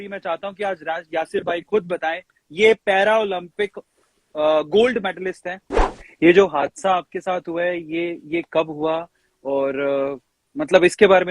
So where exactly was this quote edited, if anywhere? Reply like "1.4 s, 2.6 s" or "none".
5.9 s